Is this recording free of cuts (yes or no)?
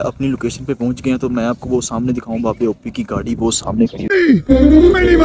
yes